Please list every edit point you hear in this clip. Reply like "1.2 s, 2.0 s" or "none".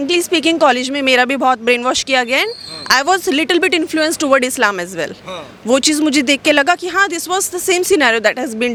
none